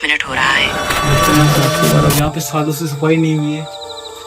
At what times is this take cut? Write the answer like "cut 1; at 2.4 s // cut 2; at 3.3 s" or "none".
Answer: cut 1; at 2.1 s